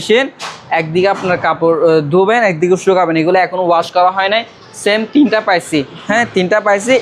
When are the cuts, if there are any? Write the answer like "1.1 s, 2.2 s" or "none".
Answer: none